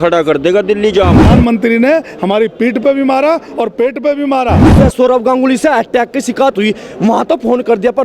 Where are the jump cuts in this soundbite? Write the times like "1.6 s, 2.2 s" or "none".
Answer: 1.3 s, 4.7 s